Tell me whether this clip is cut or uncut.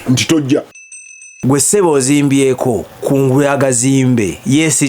cut